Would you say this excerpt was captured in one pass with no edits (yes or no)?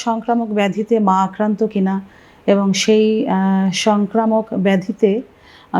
yes